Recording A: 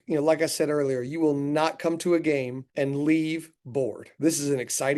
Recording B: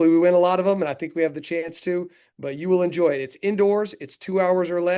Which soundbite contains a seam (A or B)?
A